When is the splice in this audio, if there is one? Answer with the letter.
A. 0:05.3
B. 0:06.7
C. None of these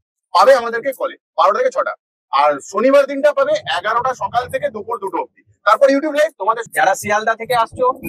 B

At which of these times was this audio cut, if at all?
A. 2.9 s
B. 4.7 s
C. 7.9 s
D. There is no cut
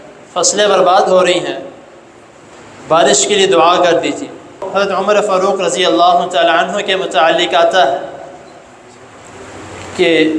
B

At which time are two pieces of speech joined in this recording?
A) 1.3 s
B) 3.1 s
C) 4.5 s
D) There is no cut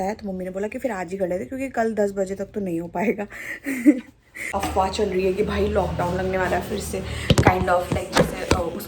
C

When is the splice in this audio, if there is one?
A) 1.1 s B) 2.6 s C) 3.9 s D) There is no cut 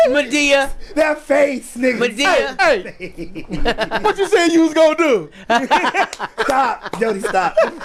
D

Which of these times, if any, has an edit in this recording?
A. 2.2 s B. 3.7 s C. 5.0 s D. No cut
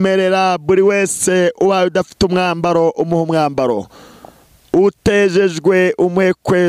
D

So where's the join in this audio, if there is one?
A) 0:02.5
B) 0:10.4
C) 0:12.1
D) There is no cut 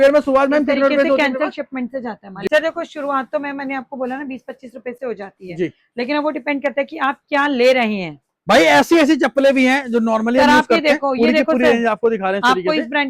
A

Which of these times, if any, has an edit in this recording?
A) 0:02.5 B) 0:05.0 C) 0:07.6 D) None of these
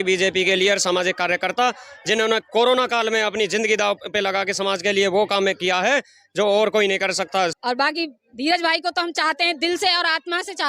C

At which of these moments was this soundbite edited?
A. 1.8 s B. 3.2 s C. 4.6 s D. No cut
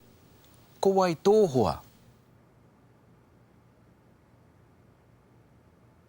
D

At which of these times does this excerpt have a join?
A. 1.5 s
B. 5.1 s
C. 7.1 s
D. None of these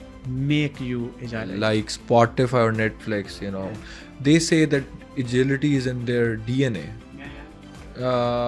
A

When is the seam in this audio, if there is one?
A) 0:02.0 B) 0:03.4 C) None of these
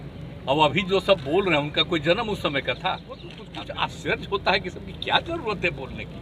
B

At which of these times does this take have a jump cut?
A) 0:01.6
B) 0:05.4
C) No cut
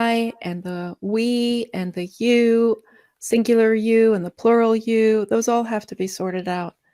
C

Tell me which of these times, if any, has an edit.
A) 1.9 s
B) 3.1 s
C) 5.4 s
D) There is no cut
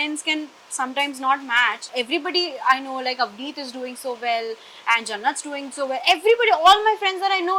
A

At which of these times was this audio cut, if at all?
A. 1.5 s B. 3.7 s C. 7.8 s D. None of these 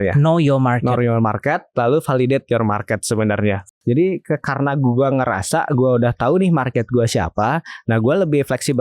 B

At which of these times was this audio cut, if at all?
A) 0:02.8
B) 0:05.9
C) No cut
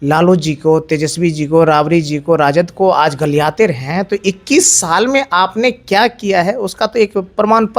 C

